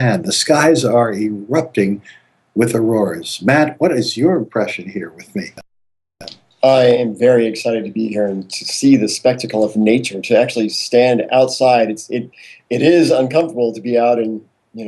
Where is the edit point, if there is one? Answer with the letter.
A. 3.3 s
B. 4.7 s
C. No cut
A